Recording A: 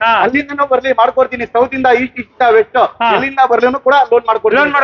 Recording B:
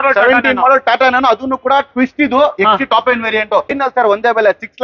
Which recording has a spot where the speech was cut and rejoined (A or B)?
B